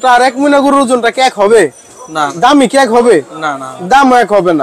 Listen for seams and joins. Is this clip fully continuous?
no; 1 cut; at 2.3 s

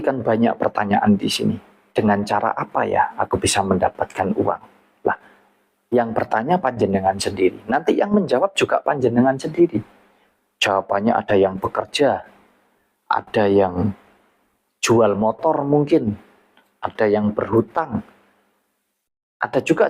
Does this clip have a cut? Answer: yes; 1 cut; at 1.7 s

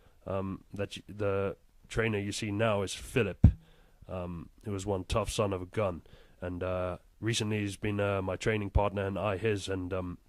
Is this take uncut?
no; 1 cut; at 7.4 s

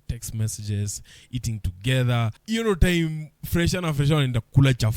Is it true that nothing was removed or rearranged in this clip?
no; 1 cut; at 2.4 s

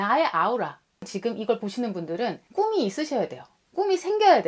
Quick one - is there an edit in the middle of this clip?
yes; 2 cuts; at 1.1 s, 2.4 s

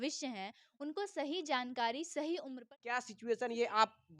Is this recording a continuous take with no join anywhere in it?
no; 1 cut; at 2.7 s

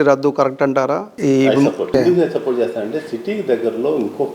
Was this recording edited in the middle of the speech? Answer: yes; 2 cuts; at 1.1 s, 1.9 s

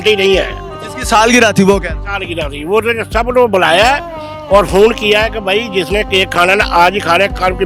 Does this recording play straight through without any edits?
yes; 0 cuts

